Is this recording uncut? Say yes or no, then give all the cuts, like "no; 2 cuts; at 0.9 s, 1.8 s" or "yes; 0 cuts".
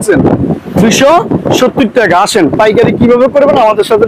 yes; 0 cuts